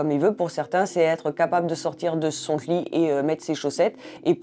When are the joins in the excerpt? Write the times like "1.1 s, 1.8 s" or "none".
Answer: none